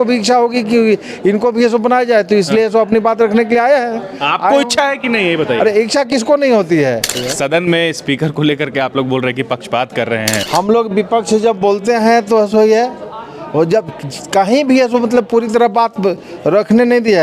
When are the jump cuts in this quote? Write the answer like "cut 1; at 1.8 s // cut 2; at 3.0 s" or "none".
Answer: cut 1; at 7.1 s // cut 2; at 10.4 s